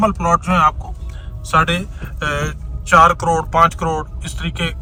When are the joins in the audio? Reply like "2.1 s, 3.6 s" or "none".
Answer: none